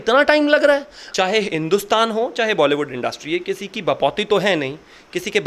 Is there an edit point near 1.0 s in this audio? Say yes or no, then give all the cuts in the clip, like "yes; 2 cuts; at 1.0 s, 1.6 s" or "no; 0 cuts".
yes; 1 cut; at 1.0 s